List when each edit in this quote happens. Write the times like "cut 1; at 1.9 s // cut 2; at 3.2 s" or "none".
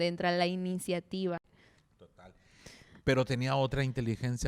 cut 1; at 1.6 s